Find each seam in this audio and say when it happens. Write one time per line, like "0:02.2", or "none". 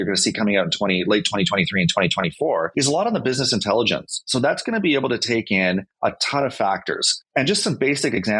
0:02.7
0:05.9
0:07.1